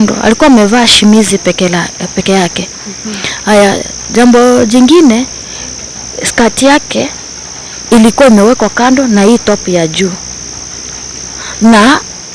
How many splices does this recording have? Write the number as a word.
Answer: zero